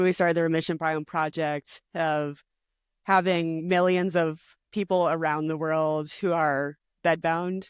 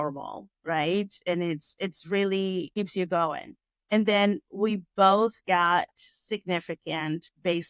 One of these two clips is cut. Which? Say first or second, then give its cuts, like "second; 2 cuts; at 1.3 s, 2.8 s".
second; 1 cut; at 2.7 s